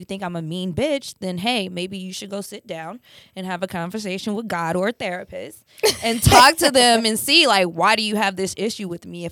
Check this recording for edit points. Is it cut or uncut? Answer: uncut